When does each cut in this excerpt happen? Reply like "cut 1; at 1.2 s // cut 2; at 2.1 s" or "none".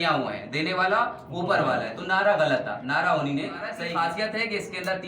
cut 1; at 3.8 s